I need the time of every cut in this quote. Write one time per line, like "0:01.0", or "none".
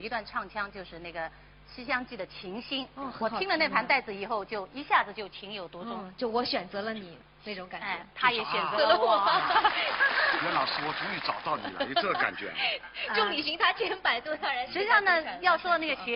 0:01.4